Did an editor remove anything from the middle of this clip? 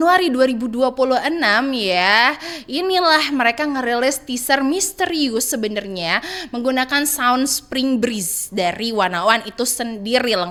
no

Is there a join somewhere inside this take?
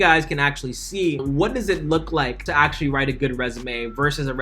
yes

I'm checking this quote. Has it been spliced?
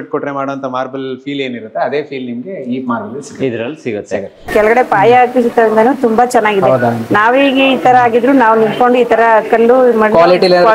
no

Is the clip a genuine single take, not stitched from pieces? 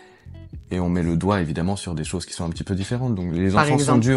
yes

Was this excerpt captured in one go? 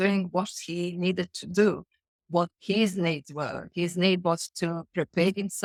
yes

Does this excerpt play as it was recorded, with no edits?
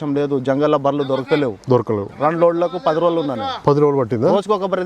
yes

